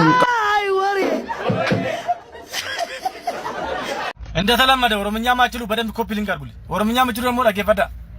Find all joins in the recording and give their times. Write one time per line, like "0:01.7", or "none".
0:04.1